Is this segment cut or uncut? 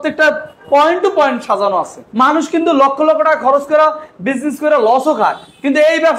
cut